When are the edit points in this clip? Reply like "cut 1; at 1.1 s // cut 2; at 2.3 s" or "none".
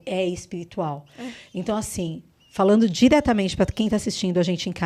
none

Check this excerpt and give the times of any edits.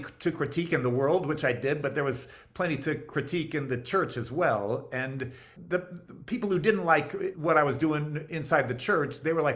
cut 1; at 5.5 s // cut 2; at 7.4 s

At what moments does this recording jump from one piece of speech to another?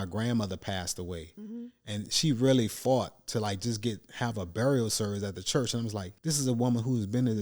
cut 1; at 6.1 s

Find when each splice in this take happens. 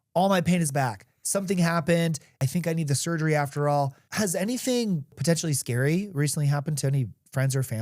cut 1; at 2.4 s // cut 2; at 4.0 s // cut 3; at 5.2 s

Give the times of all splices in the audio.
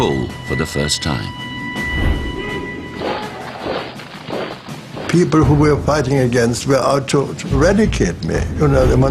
cut 1; at 8.2 s

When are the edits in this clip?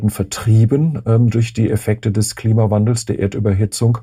none

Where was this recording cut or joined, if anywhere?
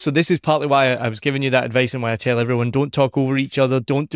none

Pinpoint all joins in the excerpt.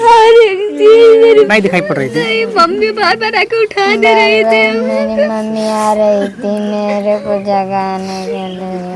cut 1; at 1.5 s

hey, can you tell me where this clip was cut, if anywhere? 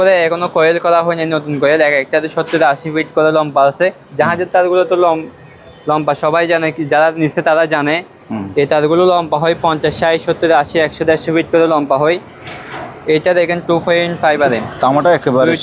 none

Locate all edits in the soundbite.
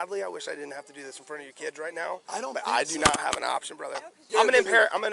cut 1; at 4.2 s

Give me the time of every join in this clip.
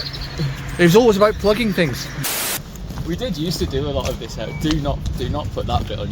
cut 1; at 2.6 s

